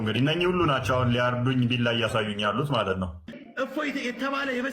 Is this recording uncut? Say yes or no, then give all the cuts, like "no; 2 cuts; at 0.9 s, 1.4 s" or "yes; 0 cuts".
no; 1 cut; at 3.3 s